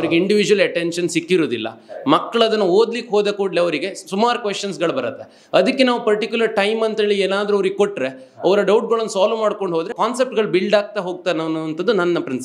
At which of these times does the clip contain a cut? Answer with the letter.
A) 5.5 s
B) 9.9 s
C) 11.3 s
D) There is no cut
B